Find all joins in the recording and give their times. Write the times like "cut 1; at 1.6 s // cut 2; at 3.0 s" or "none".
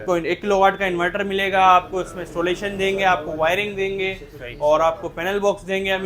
none